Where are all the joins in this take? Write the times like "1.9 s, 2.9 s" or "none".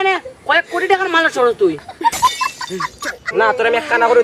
3.3 s